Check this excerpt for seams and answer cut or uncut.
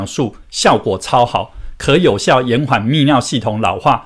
uncut